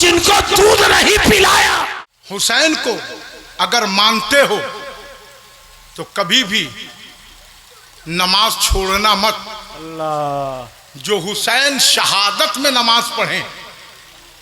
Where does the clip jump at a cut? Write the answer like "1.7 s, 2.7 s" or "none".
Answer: 2.0 s